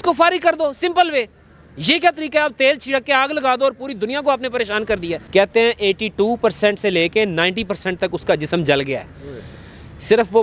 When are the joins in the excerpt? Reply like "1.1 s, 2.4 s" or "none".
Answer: 5.2 s

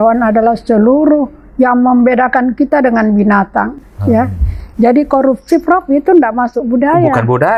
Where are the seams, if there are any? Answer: none

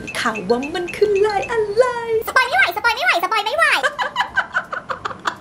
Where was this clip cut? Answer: 2.3 s, 3.8 s

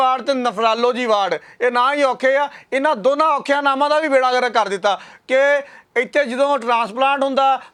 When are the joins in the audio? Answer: none

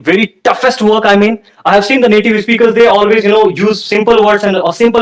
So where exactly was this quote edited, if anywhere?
none

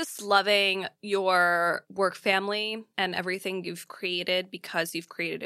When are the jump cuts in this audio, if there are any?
0.9 s, 1.9 s, 2.9 s

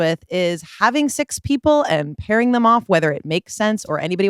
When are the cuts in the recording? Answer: none

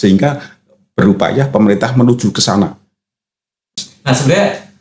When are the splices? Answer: 3.7 s

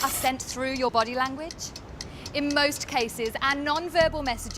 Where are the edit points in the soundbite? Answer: 2.1 s

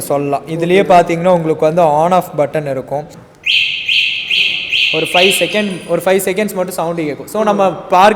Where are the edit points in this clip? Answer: 3.2 s

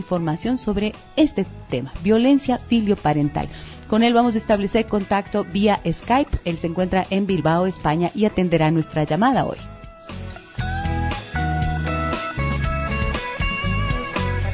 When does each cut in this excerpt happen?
2.1 s

